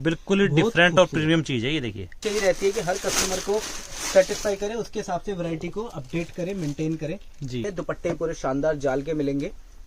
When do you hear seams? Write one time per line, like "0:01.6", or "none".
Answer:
0:02.2
0:07.7